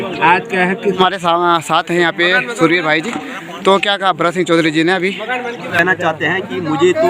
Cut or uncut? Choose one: cut